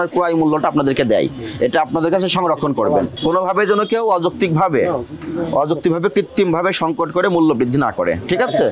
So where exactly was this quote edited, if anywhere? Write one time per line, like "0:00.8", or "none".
0:03.1